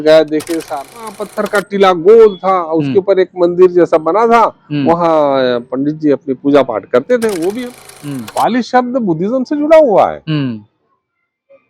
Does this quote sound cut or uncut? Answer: cut